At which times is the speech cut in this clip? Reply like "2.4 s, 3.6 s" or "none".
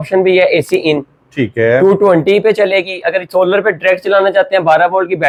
none